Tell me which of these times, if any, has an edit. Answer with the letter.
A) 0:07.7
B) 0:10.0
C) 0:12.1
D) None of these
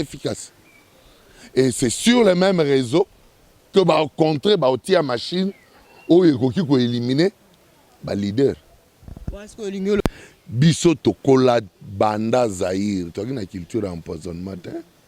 B